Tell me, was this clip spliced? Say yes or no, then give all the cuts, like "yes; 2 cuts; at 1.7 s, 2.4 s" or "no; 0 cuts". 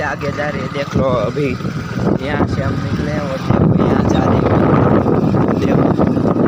no; 0 cuts